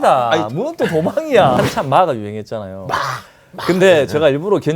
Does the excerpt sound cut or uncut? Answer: cut